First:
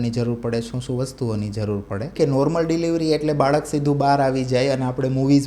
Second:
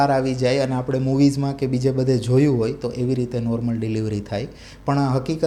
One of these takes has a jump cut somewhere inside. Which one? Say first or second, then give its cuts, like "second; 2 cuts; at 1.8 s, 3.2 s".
first; 1 cut; at 2.1 s